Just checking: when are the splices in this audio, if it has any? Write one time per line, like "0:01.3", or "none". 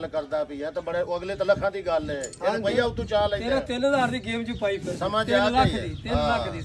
none